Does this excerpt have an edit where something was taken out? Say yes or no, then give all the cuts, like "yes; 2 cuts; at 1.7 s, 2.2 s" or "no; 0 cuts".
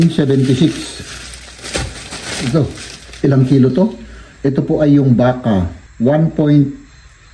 yes; 1 cut; at 5.8 s